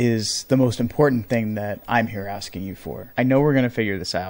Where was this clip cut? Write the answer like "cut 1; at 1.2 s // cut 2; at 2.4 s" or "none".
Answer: cut 1; at 3.0 s